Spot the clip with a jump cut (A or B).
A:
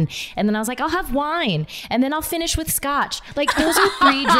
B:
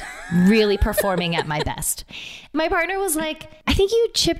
B